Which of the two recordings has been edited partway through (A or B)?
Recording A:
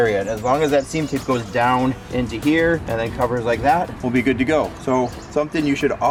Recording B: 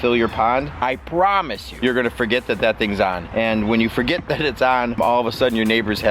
B